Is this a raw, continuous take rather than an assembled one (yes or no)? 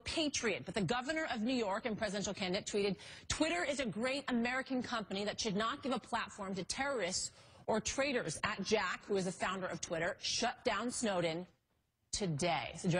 no